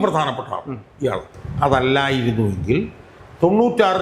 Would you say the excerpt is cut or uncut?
cut